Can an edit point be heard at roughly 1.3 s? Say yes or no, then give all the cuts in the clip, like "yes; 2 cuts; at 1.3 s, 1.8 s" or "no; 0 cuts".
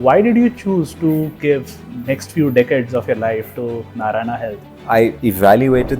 yes; 2 cuts; at 1.3 s, 5.0 s